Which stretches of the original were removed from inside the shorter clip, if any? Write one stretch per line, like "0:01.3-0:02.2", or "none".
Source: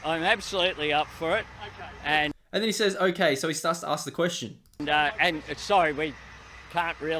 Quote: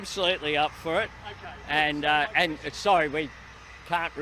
0:02.3-0:04.8

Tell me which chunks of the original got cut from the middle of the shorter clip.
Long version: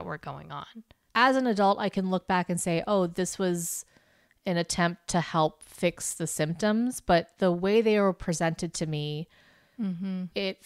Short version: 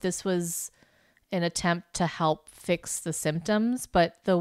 none

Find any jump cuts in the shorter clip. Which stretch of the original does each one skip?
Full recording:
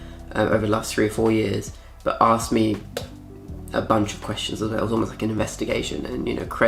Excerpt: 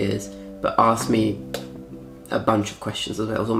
none

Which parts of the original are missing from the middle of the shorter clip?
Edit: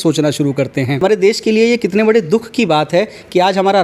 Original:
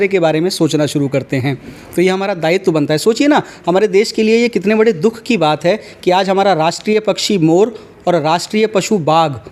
0:01.6-0:03.7

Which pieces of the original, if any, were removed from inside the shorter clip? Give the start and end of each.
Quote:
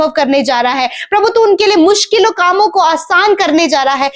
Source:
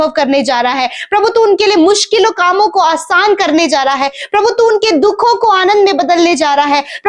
none

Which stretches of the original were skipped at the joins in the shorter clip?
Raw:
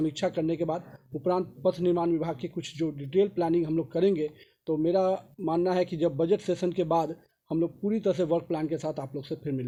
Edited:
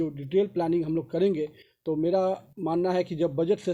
none

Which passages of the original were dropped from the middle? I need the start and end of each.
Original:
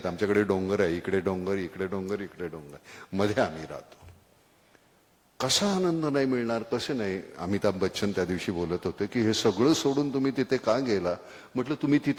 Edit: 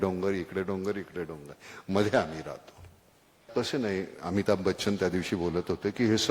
0:04.7-0:06.7

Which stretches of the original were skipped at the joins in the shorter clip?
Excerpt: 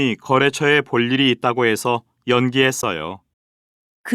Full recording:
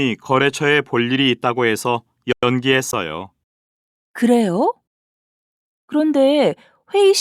0:02.3-0:02.4

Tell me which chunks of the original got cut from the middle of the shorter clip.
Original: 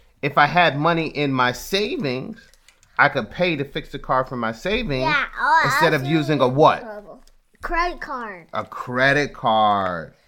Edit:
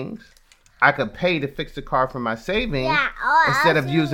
none

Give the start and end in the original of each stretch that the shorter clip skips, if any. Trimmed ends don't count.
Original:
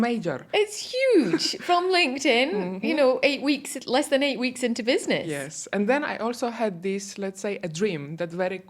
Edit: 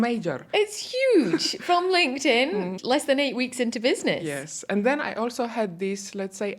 0:02.7-0:03.8

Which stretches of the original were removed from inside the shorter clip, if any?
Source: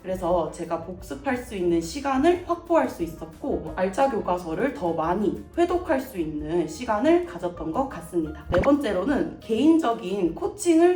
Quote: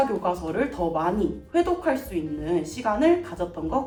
none

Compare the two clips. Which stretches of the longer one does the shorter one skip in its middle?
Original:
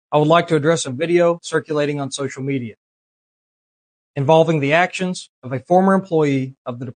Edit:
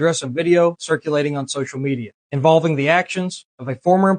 0:02.8-0:04.0

